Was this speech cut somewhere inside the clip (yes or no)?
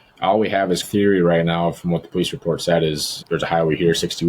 yes